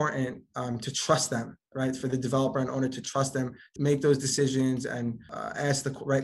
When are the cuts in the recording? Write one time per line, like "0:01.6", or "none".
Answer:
0:03.7
0:05.3

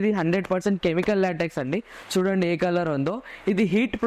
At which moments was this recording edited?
none

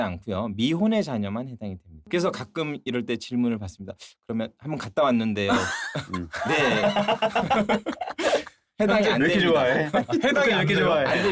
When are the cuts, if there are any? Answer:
0:01.9

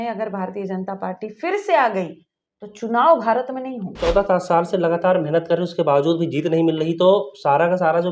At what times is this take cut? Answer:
0:04.0

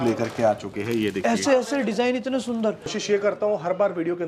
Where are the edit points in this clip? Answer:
0:03.0

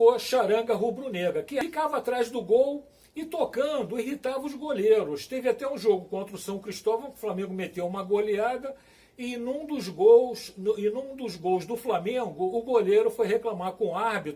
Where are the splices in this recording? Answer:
0:01.6

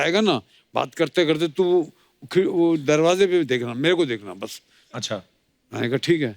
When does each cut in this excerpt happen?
none

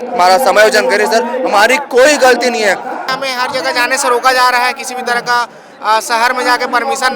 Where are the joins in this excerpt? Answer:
0:03.1

